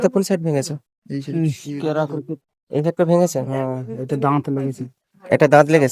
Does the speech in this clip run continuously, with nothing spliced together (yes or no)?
yes